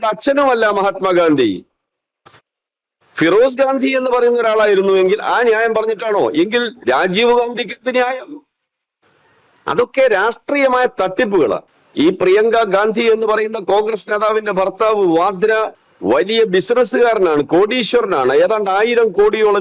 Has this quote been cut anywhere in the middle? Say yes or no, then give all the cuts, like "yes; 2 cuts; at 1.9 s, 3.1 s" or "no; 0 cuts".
yes; 2 cuts; at 11.8 s, 15.8 s